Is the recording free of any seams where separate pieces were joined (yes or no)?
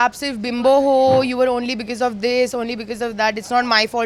yes